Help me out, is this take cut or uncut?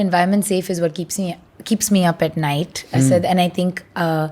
uncut